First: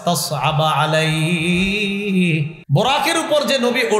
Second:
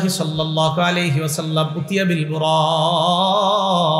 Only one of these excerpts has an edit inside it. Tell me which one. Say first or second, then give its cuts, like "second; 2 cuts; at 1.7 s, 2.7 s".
first; 1 cut; at 2.6 s